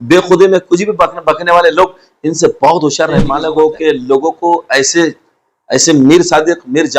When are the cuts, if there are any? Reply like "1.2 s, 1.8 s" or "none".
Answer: 3.2 s